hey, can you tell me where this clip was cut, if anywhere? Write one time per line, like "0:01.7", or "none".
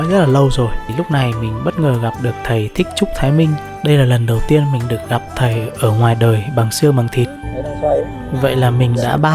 0:00.9
0:07.4